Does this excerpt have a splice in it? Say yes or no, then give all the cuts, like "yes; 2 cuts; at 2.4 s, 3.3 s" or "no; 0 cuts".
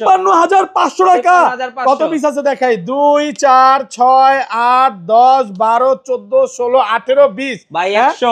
no; 0 cuts